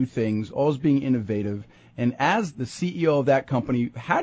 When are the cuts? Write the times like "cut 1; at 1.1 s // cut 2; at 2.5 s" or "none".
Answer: cut 1; at 2.6 s